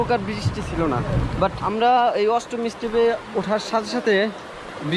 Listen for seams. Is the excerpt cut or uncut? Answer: cut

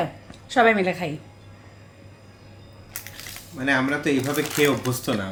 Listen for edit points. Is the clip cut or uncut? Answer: uncut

